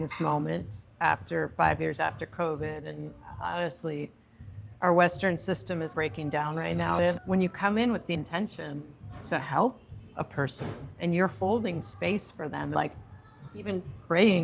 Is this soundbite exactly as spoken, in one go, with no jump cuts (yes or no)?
no